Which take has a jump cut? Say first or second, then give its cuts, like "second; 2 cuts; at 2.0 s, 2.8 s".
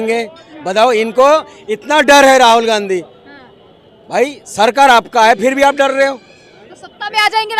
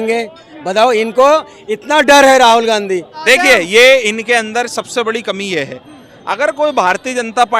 second; 1 cut; at 3.3 s